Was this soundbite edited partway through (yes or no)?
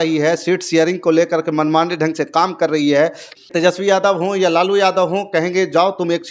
yes